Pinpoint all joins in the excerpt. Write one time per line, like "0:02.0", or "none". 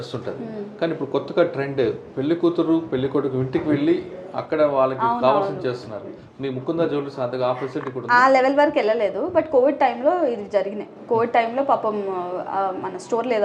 none